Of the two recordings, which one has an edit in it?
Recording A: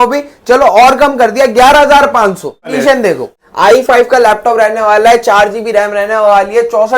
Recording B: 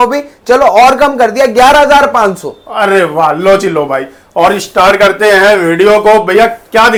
A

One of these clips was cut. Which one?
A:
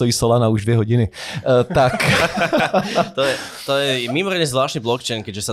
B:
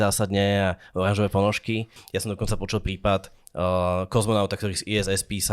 B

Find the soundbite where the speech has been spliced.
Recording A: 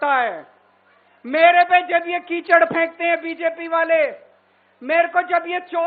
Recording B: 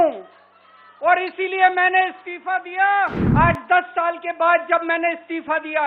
B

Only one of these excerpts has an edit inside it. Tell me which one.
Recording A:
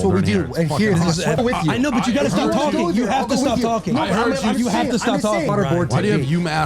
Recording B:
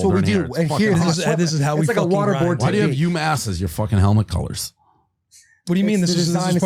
A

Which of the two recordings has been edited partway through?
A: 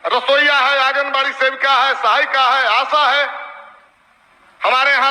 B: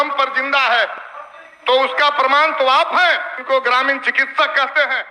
B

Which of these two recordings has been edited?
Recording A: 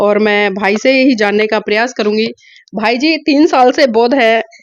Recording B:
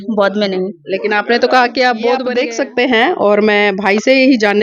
B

